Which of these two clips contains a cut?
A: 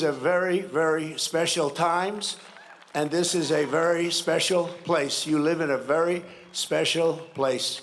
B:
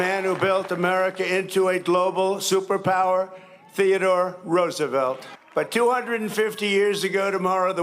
B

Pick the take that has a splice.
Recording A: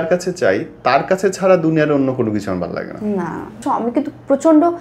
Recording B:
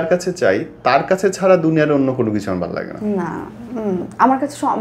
A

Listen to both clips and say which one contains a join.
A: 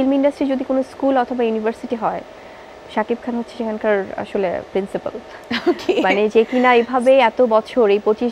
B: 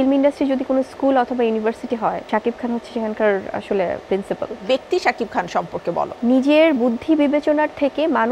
B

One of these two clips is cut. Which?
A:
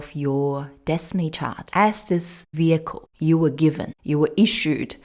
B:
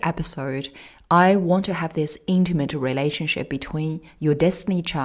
A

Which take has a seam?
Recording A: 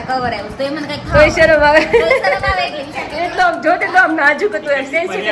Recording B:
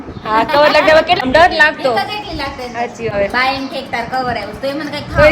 B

